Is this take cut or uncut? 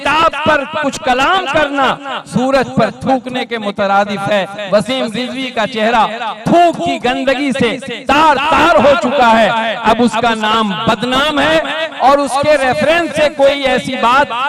uncut